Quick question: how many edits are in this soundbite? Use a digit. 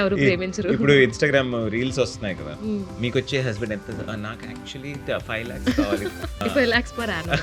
1